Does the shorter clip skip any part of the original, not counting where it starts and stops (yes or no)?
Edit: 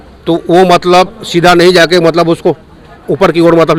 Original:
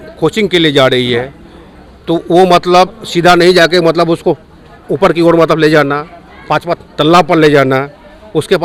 no